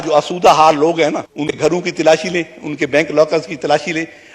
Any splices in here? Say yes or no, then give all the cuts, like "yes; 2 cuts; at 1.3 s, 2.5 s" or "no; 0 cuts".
yes; 1 cut; at 1.6 s